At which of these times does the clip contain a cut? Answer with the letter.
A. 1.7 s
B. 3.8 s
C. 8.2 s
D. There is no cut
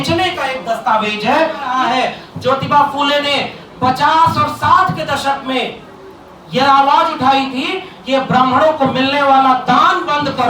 A